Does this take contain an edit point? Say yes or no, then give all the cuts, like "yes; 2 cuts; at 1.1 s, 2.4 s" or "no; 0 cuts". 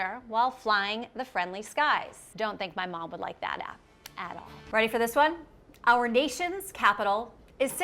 yes; 1 cut; at 4.6 s